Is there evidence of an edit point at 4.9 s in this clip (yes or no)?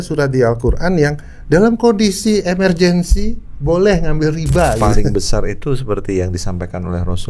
yes